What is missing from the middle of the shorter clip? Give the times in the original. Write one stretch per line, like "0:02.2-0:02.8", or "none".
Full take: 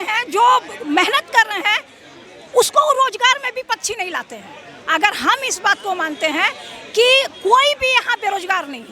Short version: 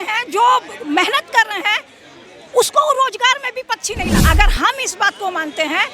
0:04.2-0:04.9